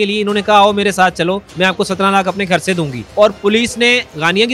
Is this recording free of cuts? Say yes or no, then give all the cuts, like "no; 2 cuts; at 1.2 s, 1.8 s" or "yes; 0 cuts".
no; 2 cuts; at 1.5 s, 3.0 s